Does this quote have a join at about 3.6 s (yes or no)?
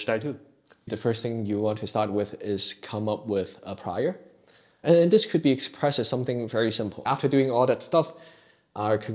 no